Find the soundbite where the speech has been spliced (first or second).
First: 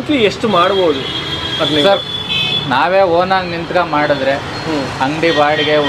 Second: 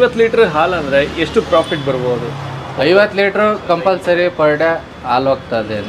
first